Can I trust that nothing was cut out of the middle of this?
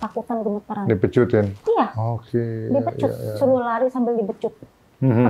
yes; 0 cuts

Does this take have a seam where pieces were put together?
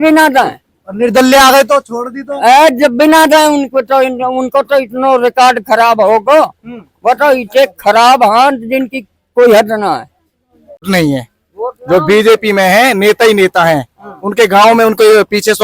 yes; 1 cut; at 10.8 s

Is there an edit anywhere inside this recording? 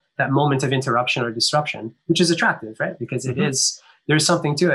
no; 0 cuts

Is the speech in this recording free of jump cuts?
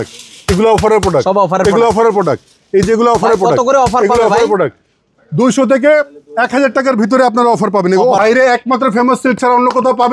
no; 1 cut; at 8.2 s

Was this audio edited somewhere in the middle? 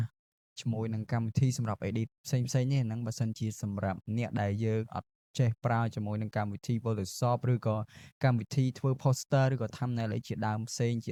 no; 0 cuts

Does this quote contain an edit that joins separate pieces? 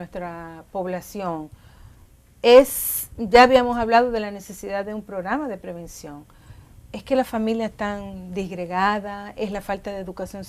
yes; 1 cut; at 3.0 s

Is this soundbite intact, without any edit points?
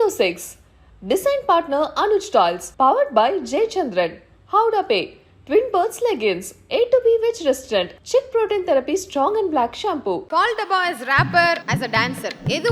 no; 2 cuts; at 10.3 s, 11.7 s

